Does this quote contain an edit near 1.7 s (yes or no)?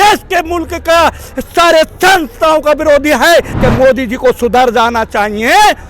no